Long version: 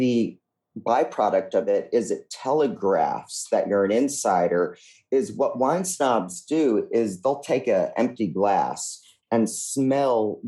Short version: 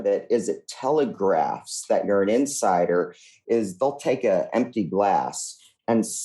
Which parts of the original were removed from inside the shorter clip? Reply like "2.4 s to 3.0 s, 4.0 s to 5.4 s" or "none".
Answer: 5.0 s to 6.9 s